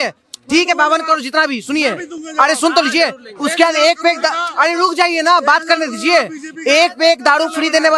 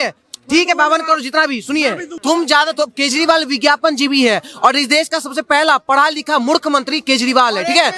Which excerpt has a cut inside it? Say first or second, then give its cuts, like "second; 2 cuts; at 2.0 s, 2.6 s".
second; 1 cut; at 2.1 s